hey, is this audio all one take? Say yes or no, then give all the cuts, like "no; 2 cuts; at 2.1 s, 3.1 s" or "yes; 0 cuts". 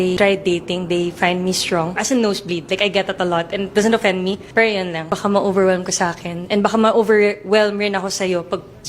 no; 2 cuts; at 3.8 s, 5.9 s